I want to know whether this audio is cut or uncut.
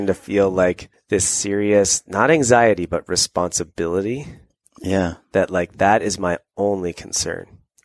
cut